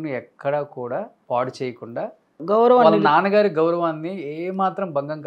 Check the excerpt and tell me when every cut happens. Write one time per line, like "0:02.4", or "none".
0:01.2
0:02.4